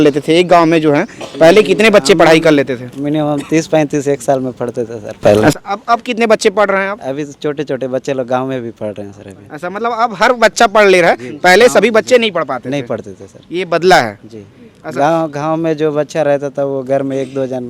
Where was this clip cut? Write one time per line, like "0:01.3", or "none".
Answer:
none